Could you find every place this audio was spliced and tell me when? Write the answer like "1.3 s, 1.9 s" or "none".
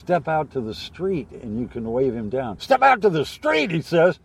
2.6 s